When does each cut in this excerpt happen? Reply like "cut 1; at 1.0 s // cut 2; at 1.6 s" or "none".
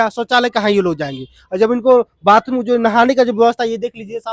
none